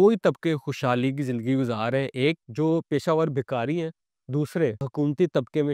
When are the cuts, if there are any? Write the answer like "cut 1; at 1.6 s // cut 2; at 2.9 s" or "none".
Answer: cut 1; at 2.5 s // cut 2; at 4.8 s